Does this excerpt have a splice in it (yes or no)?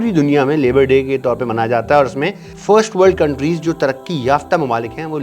yes